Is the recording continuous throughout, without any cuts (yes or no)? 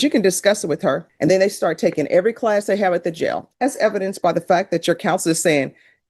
no